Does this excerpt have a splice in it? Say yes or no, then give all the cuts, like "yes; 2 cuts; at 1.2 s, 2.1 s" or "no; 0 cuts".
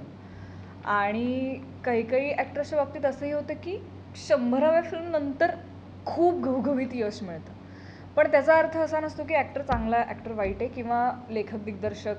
no; 0 cuts